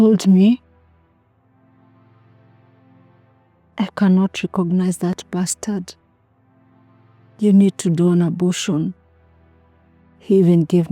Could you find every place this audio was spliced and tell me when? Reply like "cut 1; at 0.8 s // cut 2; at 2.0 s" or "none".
cut 1; at 0.8 s // cut 2; at 3.8 s // cut 3; at 5.9 s // cut 4; at 7.4 s